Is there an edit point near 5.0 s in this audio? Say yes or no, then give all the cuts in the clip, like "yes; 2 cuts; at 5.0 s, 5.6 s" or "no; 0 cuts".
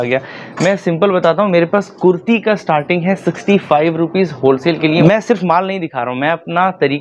yes; 1 cut; at 5.0 s